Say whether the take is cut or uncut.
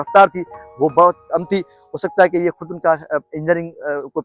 uncut